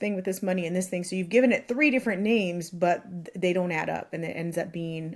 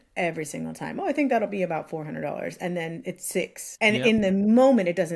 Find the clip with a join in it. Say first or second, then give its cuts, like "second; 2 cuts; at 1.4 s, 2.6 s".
second; 1 cut; at 3.6 s